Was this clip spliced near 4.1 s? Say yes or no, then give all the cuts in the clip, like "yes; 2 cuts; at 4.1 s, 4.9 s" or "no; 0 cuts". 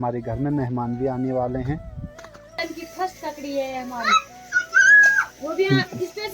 no; 1 cut; at 2.6 s